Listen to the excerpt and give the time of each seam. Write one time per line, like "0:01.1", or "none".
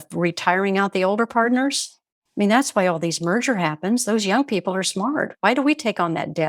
none